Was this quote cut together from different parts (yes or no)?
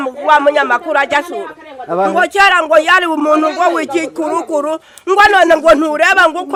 no